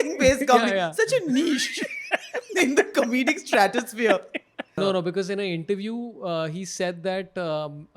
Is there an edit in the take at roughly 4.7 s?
yes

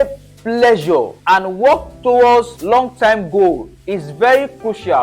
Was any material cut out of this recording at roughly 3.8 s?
no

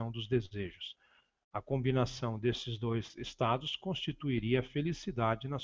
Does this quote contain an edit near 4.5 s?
yes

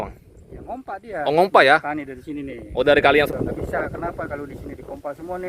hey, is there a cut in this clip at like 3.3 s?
yes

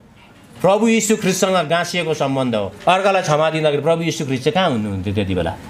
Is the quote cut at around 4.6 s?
no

